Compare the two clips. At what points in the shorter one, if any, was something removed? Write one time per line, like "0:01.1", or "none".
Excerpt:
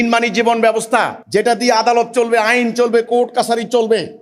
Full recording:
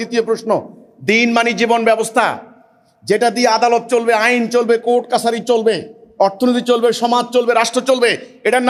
0:01.2